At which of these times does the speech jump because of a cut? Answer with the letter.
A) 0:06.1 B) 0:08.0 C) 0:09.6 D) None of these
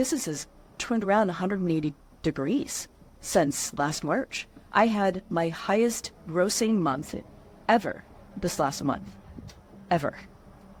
D